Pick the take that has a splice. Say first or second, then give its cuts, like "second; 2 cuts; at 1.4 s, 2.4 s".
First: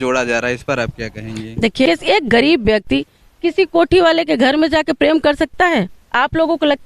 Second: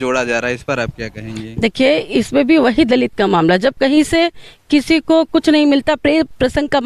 first; 1 cut; at 1.9 s